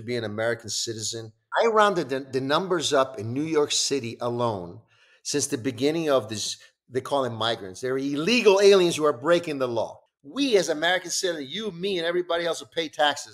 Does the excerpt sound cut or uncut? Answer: cut